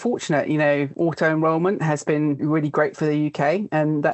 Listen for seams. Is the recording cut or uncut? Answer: cut